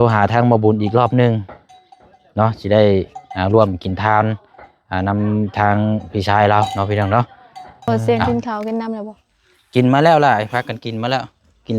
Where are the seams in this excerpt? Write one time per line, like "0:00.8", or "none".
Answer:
0:07.9